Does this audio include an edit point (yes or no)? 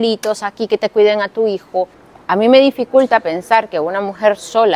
yes